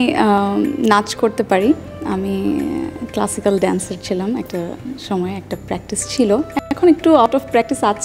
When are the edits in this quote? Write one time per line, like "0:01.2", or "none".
none